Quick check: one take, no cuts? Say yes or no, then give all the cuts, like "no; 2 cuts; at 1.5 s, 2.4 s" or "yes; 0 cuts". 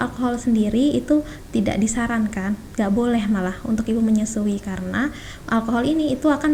yes; 0 cuts